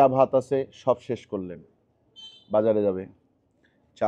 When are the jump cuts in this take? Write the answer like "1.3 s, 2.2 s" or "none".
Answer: none